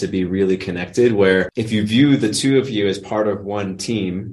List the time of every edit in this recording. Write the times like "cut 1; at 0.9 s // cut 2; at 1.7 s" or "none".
cut 1; at 1.6 s